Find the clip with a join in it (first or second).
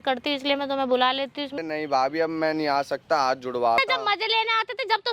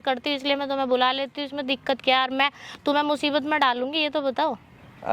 first